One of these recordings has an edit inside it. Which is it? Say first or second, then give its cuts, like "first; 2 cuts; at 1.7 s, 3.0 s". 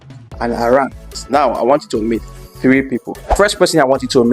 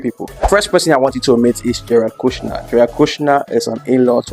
first; 1 cut; at 1.2 s